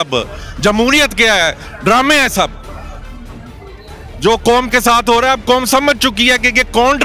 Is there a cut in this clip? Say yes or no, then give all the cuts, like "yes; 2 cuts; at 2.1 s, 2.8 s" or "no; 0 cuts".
no; 0 cuts